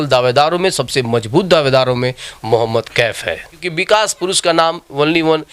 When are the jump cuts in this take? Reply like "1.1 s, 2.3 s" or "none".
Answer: 3.6 s